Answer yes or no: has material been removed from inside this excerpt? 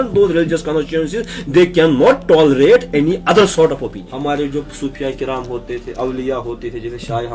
yes